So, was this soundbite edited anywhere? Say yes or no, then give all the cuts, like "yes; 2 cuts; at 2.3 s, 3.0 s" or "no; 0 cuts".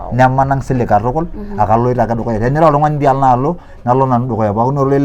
no; 0 cuts